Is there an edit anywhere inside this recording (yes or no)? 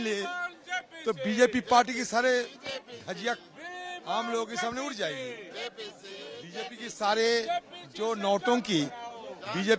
no